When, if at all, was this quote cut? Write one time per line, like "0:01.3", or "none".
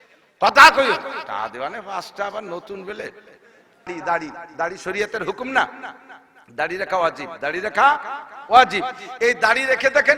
0:03.9